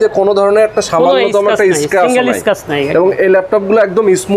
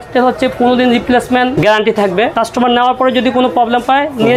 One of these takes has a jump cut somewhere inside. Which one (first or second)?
second